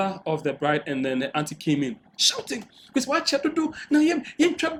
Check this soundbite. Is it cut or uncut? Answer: uncut